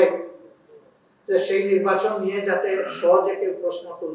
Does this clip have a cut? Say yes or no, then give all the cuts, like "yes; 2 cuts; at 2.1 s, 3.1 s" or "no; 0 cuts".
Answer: no; 0 cuts